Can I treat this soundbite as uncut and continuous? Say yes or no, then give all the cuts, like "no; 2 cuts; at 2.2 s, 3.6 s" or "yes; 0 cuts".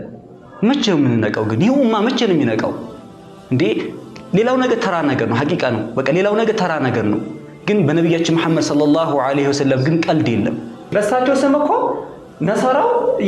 no; 1 cut; at 10.9 s